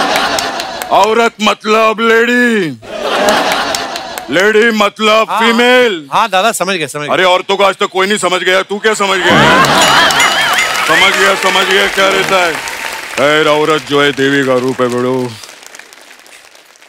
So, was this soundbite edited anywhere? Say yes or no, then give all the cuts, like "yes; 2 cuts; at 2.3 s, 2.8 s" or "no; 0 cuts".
no; 0 cuts